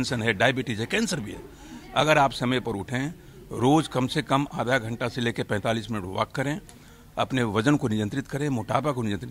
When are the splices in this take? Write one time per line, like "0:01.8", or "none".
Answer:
none